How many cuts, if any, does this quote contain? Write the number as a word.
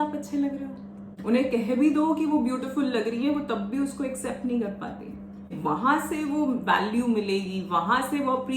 two